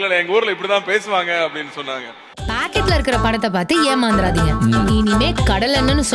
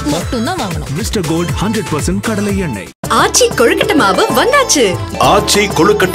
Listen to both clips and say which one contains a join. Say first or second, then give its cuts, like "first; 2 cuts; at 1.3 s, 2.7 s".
first; 1 cut; at 2.4 s